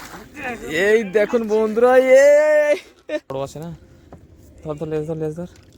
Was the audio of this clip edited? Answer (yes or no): yes